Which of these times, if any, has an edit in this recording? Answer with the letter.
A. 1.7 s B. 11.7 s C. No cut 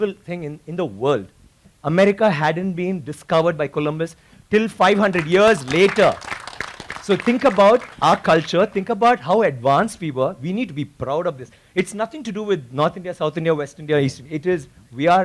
A